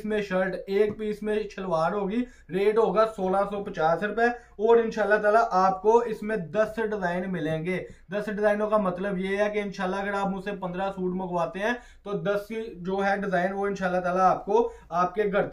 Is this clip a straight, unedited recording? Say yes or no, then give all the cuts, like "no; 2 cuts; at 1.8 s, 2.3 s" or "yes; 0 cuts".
yes; 0 cuts